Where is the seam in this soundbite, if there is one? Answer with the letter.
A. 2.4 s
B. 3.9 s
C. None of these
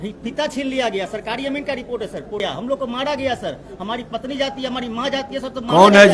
A